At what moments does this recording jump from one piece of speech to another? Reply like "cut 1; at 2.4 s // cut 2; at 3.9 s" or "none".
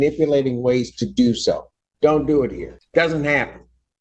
cut 1; at 2.7 s

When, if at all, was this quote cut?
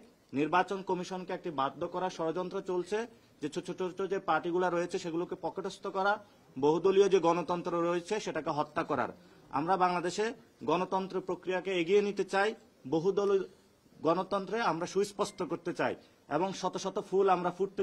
none

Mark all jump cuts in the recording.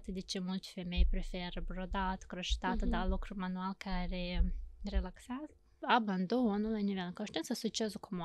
cut 1; at 5.8 s

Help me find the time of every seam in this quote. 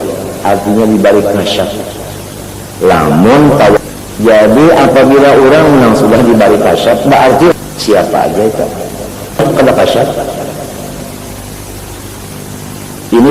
cut 1; at 3.8 s // cut 2; at 7.5 s // cut 3; at 9.4 s

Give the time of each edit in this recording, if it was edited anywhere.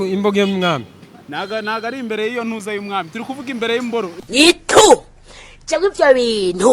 cut 1; at 4.2 s

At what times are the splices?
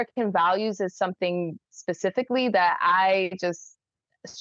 none

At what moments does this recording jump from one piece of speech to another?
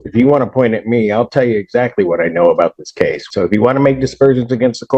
cut 1; at 3.2 s

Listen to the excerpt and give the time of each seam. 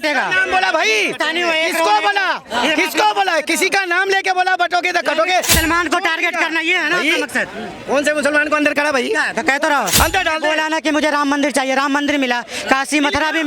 cut 1; at 5.5 s // cut 2; at 9.9 s

